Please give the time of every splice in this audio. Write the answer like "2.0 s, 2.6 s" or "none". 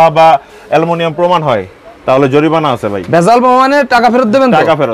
none